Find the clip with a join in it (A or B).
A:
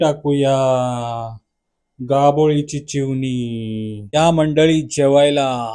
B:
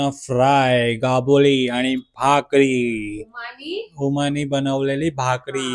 A